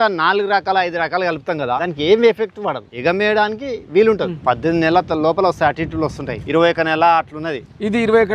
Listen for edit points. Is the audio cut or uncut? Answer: cut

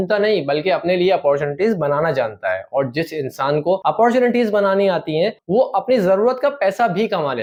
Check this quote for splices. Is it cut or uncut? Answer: uncut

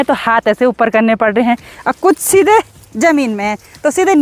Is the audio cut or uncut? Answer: uncut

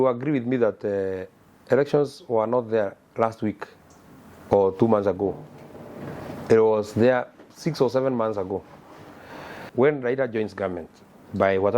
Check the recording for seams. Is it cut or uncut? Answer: cut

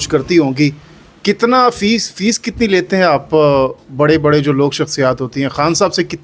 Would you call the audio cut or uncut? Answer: uncut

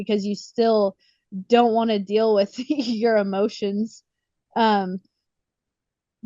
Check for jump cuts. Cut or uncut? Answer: uncut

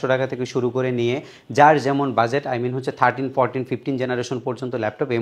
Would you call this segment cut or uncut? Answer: uncut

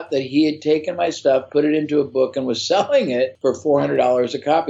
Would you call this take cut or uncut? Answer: cut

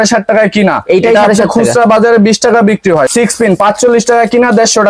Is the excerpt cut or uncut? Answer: cut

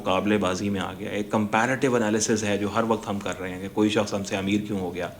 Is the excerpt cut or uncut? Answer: uncut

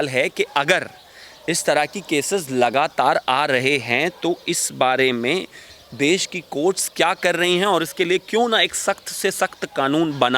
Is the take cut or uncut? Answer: uncut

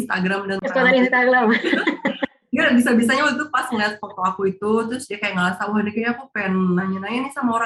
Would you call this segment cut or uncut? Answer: uncut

